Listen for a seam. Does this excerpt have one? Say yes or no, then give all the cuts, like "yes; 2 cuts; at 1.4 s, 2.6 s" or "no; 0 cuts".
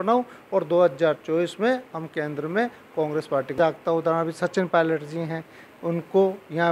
yes; 1 cut; at 3.6 s